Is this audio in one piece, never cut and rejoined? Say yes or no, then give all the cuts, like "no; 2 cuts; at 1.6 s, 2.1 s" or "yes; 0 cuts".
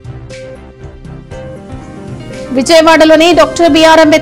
no; 1 cut; at 2.1 s